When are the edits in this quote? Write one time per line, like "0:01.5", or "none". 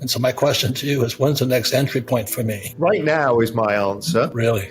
0:02.6